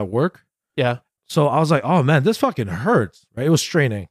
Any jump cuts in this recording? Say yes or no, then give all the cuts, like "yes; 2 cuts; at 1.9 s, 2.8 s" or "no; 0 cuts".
yes; 1 cut; at 1.1 s